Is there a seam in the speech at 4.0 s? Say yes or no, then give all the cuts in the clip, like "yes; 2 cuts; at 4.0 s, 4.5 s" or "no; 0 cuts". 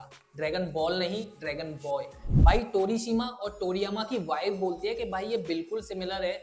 no; 1 cut; at 2.2 s